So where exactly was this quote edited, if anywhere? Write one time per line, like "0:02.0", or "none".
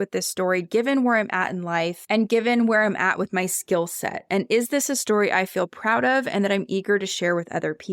0:02.0

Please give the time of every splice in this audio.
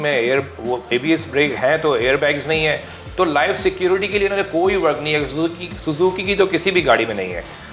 none

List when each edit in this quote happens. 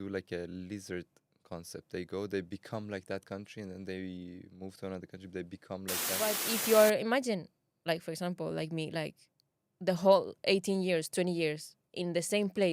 0:06.4

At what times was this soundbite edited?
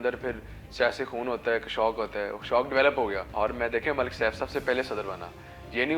0:03.2

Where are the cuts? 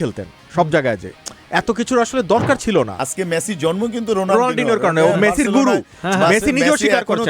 0:03.0

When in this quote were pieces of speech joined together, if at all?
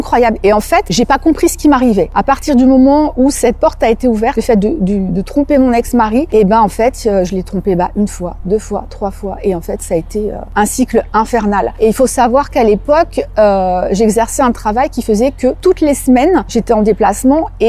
0:00.9
0:02.1
0:04.4
0:06.3
0:10.4
0:11.7
0:15.6
0:16.5

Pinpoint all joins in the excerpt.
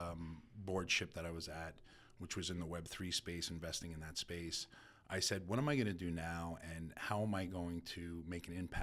none

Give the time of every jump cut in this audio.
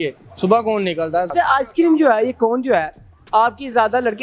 0:01.3

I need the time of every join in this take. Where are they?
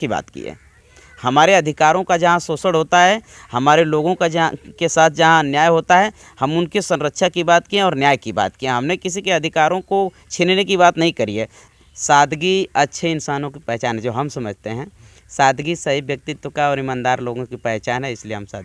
0:11.7

